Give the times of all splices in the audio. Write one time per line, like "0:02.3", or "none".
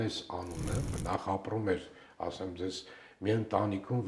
0:01.0

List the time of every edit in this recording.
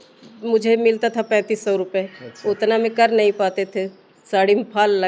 none

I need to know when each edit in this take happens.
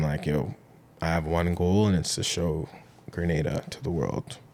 none

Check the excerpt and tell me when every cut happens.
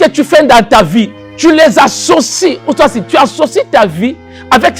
0:01.2

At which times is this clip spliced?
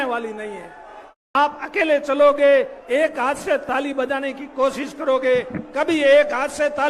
0:01.2

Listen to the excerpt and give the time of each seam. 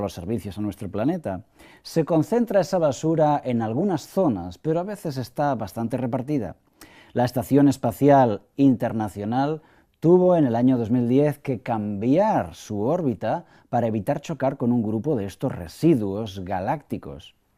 none

